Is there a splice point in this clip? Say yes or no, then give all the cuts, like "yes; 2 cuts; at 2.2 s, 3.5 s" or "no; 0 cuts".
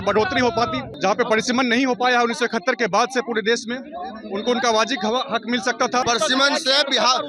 yes; 2 cuts; at 0.9 s, 6.0 s